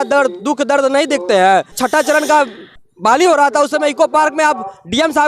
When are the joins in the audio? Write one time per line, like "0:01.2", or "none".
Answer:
0:01.7